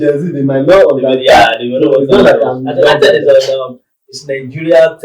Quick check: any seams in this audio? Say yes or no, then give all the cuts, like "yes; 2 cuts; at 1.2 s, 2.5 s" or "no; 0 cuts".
no; 0 cuts